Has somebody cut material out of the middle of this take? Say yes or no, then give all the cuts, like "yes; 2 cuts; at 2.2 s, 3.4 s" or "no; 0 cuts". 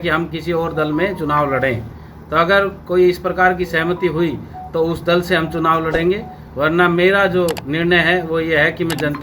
no; 0 cuts